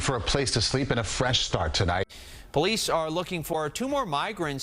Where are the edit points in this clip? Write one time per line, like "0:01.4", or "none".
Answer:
0:02.1